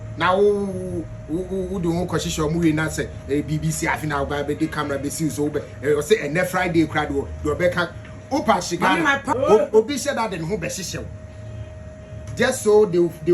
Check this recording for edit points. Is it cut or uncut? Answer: cut